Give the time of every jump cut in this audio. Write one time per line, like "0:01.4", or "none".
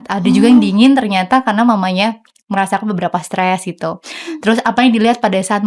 none